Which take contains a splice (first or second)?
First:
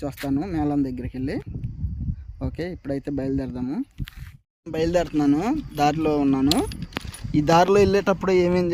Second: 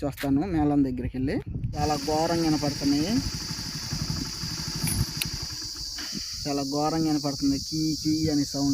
second